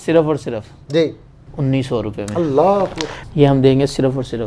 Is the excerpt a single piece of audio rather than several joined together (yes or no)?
no